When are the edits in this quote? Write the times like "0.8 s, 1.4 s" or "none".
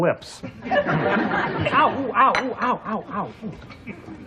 3.1 s